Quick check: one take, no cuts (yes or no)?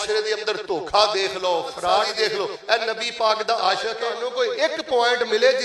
no